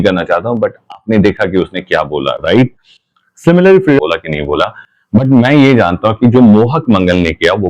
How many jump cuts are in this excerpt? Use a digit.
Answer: 1